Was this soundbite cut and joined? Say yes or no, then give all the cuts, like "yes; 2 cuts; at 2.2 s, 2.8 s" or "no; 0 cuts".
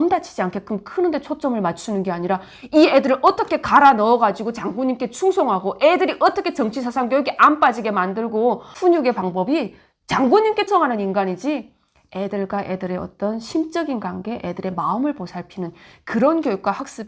yes; 1 cut; at 10.7 s